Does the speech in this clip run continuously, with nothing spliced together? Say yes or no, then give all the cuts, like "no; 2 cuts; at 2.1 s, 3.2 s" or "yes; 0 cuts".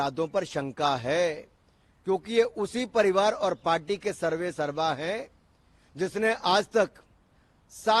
yes; 0 cuts